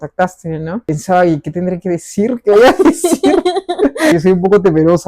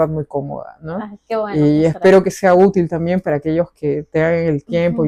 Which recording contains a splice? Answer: first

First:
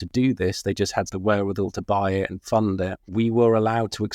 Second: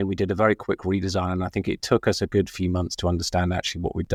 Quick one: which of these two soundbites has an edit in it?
first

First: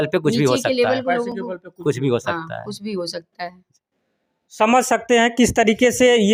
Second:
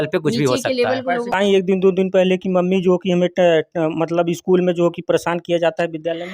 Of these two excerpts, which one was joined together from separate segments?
second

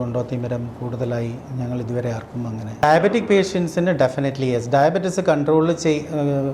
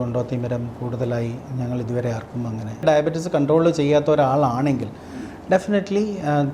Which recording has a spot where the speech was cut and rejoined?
second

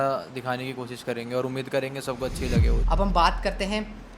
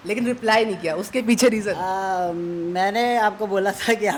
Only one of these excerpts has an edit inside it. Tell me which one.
first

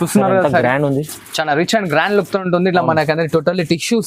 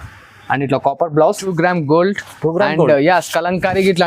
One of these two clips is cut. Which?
second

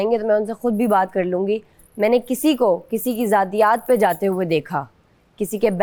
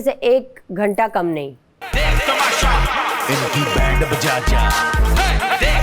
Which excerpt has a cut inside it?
second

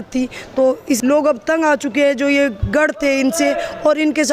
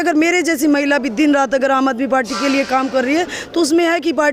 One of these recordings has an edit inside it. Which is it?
first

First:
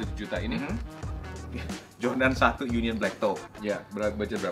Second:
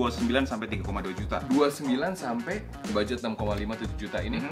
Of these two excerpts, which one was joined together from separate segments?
second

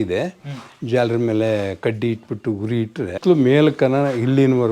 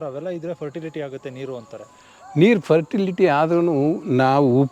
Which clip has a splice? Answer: first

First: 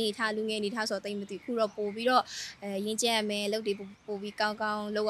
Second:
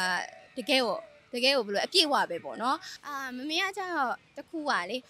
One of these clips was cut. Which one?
second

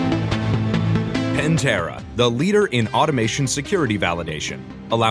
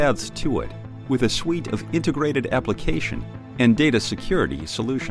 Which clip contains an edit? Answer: first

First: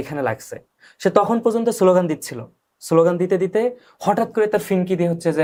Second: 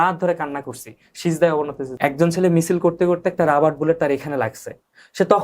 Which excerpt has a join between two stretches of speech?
second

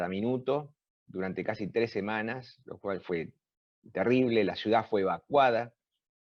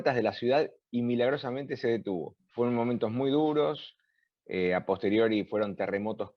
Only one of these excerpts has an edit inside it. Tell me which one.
second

